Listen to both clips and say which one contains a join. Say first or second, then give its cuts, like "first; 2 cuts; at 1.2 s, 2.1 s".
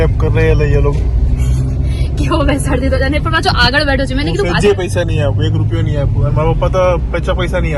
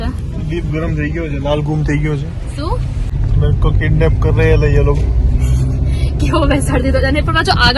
second; 1 cut; at 3.1 s